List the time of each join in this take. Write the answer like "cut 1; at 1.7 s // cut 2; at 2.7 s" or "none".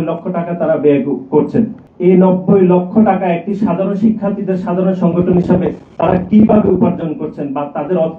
cut 1; at 1.8 s